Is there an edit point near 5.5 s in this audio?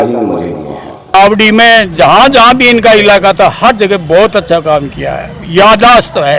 no; 1 cut; at 1.1 s

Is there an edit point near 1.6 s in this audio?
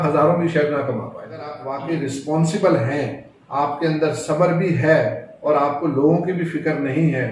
yes; 1 cut; at 1.6 s

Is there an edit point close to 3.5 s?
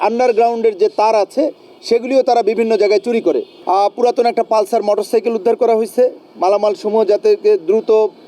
yes; 1 cut; at 3.5 s

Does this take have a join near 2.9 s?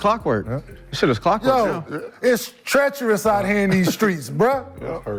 no; 0 cuts

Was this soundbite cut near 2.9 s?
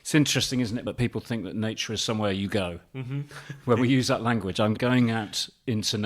no; 2 cuts; at 0.8 s, 4.8 s

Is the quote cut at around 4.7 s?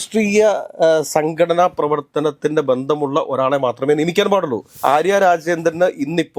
yes; 1 cut; at 4.7 s

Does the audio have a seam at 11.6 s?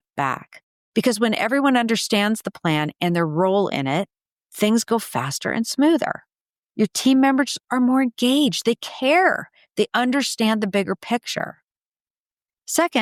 no; 0 cuts

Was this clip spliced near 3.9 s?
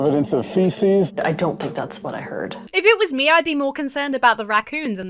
no; 1 cut; at 2.6 s

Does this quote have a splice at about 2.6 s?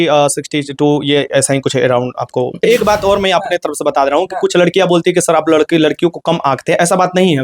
yes; 1 cut; at 2.6 s

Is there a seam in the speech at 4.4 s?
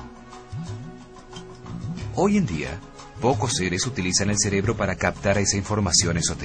yes; 1 cut; at 4.4 s

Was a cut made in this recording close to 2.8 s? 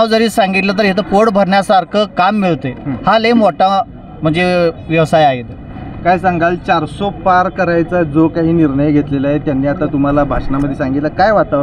no; 0 cuts

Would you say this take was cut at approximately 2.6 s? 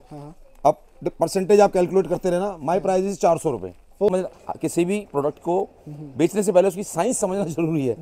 no; 1 cut; at 4.1 s

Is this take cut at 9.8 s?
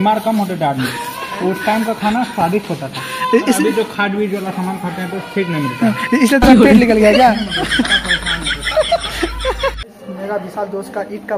yes; 1 cut; at 9.8 s

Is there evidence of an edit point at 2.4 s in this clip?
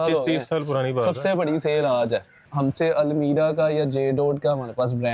yes; 1 cut; at 2.4 s

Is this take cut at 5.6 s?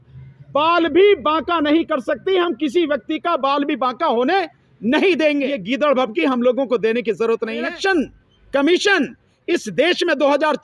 yes; 2 cuts; at 5.6 s, 7.7 s

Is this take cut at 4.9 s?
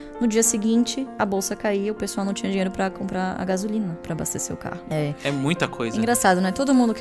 yes; 1 cut; at 4.9 s

